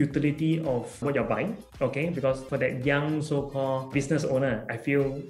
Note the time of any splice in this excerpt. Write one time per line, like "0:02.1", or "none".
0:01.0
0:02.4
0:03.9